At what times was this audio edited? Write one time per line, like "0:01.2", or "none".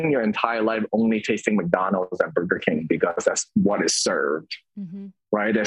none